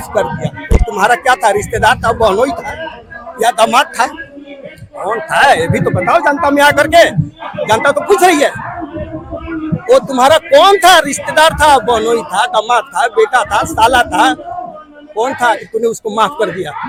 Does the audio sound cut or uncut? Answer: uncut